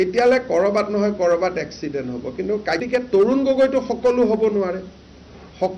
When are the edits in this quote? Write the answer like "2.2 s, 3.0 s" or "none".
2.8 s